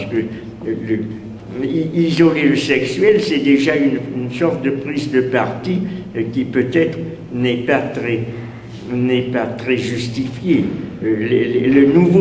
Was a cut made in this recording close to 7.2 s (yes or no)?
no